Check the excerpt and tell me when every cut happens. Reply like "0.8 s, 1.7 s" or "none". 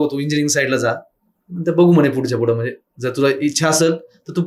none